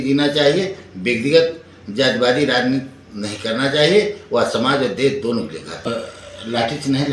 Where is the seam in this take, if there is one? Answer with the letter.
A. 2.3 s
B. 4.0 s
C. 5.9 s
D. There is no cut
C